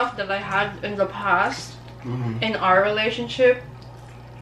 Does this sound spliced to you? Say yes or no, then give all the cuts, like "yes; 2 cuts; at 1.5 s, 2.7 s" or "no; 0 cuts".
no; 0 cuts